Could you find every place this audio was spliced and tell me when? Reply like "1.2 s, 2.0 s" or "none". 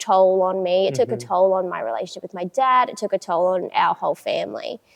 none